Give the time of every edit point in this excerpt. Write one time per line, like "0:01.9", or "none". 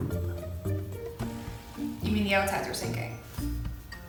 none